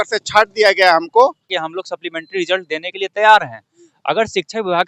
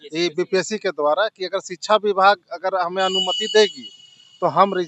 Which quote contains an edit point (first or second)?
first